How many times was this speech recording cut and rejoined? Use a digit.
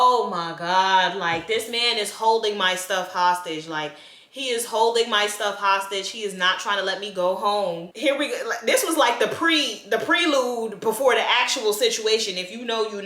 0